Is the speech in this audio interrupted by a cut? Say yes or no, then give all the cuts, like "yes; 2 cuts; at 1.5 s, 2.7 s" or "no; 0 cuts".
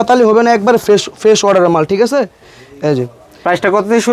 no; 0 cuts